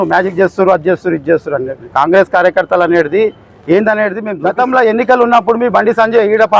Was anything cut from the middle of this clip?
yes; 1 cut; at 4.3 s

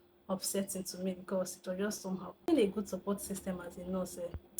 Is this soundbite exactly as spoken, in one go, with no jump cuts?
no; 1 cut; at 2.4 s

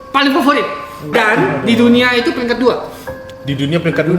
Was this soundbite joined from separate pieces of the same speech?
yes; 1 cut; at 1.1 s

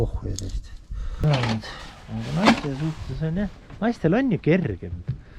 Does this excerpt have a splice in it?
yes; 1 cut; at 1.2 s

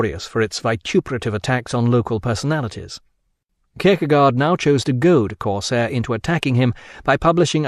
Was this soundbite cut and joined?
no; 0 cuts

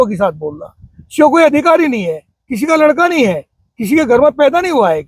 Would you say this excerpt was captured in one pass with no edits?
yes; 0 cuts

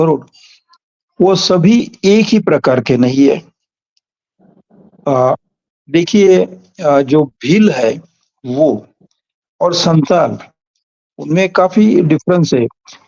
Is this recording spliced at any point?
no; 0 cuts

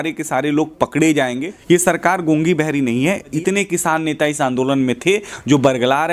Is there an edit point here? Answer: yes; 2 cuts; at 1.5 s, 3.3 s

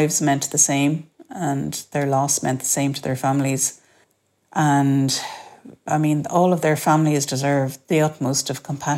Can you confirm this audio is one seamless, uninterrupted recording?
no; 1 cut; at 5.9 s

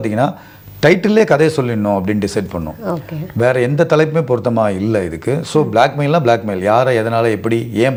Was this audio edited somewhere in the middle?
no; 0 cuts

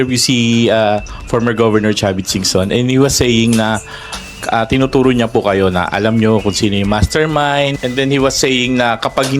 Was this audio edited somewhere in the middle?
yes; 1 cut; at 7.8 s

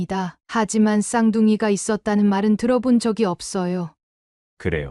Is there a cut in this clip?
yes; 1 cut; at 4.0 s

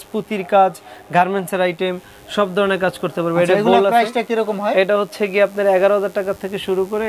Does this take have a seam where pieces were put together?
no; 0 cuts

